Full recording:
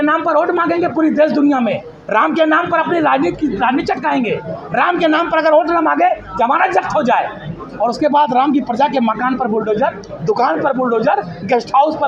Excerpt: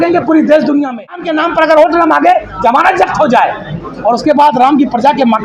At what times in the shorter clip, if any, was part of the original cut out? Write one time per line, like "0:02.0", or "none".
0:01.3